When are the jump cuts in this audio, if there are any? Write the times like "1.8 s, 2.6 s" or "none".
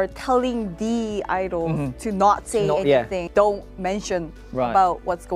3.2 s

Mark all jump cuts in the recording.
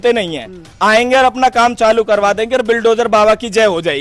none

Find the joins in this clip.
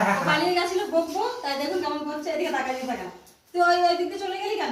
none

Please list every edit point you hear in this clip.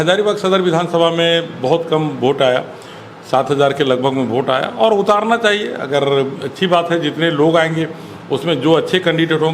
none

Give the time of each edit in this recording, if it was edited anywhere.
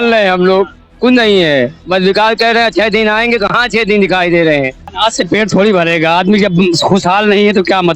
4.9 s

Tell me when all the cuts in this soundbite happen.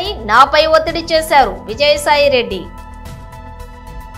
2.7 s

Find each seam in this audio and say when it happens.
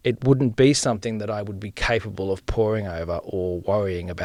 none

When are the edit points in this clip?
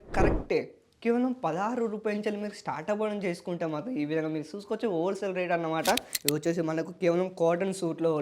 6.1 s

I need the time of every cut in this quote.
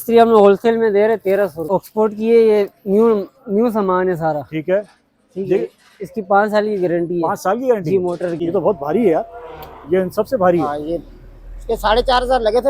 1.6 s, 8.4 s

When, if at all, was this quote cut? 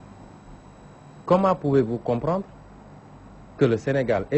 2.7 s

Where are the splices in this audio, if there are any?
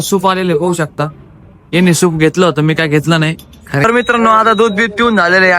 3.8 s

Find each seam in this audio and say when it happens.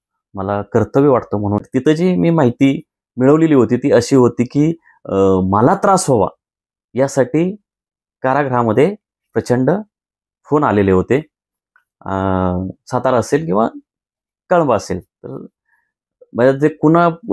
1.6 s

